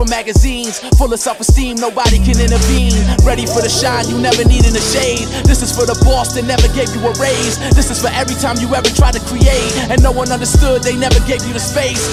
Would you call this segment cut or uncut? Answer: uncut